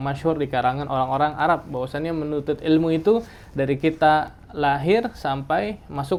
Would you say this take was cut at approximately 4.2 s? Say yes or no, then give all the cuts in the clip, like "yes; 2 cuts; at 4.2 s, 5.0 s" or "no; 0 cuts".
no; 0 cuts